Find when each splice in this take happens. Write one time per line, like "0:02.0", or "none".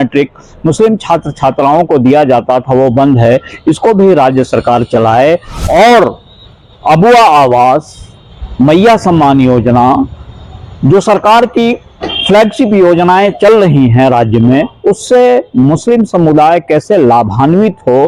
none